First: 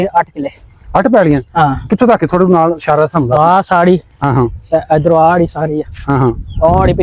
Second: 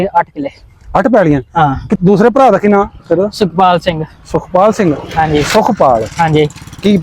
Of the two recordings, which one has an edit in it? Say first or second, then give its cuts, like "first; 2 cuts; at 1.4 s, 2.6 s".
second; 1 cut; at 2.0 s